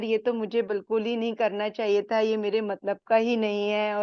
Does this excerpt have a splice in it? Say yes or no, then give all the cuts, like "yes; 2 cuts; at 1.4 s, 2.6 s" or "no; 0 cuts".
no; 0 cuts